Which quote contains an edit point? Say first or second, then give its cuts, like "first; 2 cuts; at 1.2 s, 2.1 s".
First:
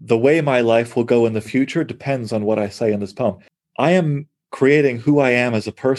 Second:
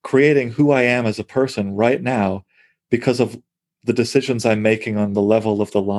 first; 1 cut; at 3.5 s